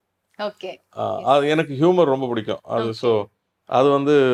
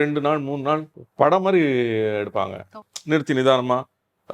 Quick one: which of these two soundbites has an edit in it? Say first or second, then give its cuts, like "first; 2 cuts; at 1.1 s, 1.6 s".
second; 2 cuts; at 1.0 s, 2.9 s